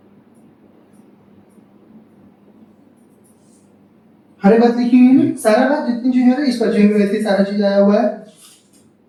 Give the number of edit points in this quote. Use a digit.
0